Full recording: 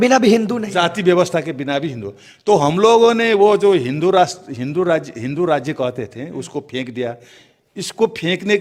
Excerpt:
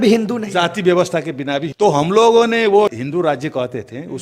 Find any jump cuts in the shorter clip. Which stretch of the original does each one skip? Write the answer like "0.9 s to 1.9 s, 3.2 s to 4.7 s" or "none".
1.9 s to 2.4 s, 3.6 s to 5.1 s